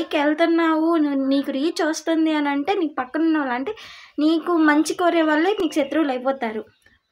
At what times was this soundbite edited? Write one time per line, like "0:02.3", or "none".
none